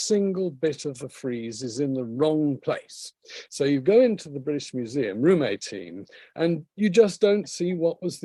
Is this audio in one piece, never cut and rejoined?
yes; 0 cuts

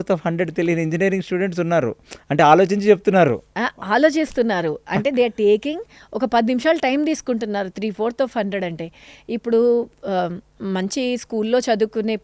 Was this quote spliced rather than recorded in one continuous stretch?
no; 0 cuts

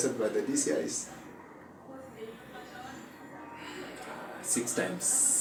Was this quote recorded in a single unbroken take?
yes; 0 cuts

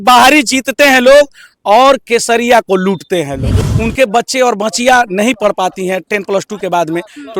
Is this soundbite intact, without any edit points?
no; 1 cut; at 3.6 s

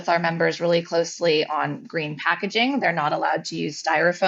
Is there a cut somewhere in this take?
no; 0 cuts

